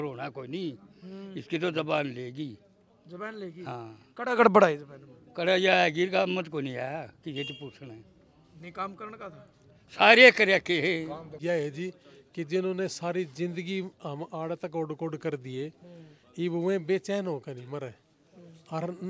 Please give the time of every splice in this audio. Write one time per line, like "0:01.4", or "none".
0:11.4